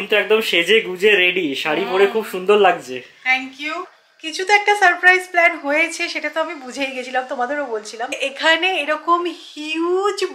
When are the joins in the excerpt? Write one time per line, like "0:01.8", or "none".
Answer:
0:04.1
0:08.2